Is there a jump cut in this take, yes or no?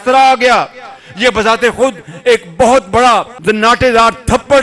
yes